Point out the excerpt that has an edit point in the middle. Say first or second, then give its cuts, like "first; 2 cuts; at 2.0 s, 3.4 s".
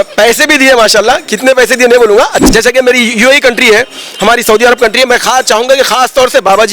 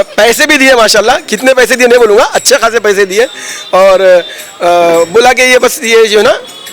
first; 1 cut; at 2.4 s